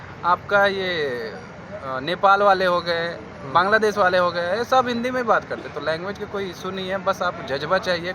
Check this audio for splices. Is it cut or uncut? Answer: uncut